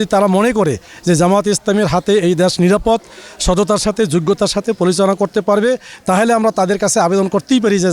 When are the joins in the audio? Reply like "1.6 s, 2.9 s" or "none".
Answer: none